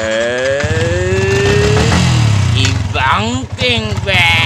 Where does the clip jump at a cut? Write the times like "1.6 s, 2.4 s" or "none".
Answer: none